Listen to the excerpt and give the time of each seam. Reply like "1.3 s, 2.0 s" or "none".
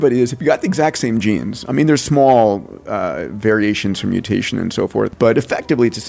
5.1 s